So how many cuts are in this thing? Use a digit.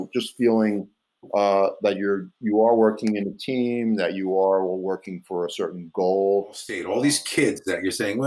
1